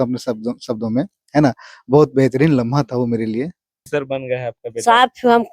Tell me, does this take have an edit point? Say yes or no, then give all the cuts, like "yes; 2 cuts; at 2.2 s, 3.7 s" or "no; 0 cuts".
yes; 1 cut; at 3.8 s